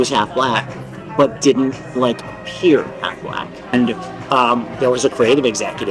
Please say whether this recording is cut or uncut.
cut